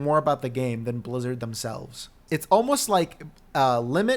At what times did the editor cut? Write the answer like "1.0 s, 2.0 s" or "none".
2.1 s